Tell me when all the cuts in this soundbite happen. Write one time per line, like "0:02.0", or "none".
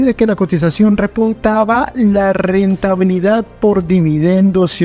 none